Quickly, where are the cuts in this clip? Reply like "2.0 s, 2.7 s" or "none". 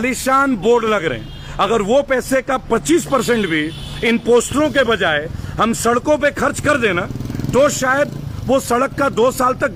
none